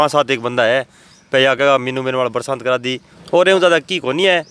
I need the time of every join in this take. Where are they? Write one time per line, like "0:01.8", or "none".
none